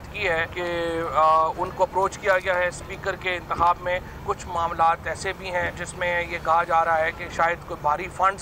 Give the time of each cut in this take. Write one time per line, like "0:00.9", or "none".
none